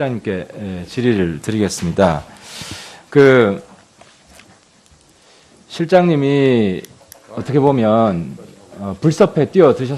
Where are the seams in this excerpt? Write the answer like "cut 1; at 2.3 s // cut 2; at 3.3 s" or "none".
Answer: cut 1; at 7.2 s